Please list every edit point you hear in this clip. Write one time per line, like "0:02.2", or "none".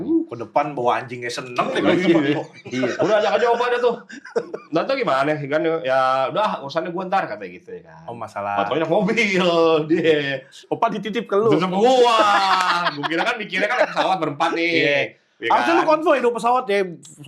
none